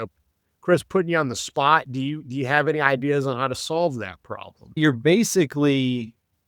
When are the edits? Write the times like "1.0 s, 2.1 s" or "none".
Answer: 4.8 s